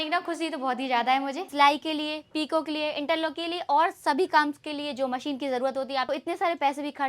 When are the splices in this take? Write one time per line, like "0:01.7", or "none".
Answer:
0:01.5
0:06.1